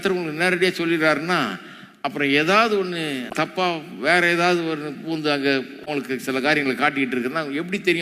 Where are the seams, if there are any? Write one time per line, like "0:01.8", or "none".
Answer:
0:03.3